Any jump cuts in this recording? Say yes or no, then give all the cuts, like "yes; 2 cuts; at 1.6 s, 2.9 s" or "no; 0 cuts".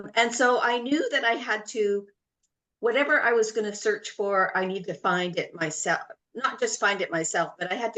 no; 0 cuts